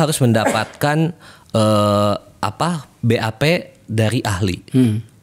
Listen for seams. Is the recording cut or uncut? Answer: uncut